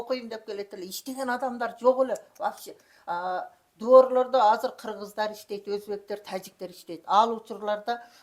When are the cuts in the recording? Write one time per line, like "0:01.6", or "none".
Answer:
none